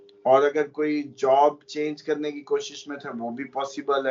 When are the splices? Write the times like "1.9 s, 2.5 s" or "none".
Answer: none